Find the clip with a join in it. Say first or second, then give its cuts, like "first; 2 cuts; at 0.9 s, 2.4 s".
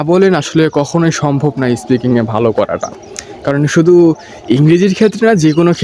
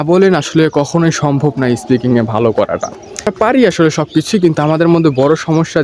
second; 1 cut; at 3.3 s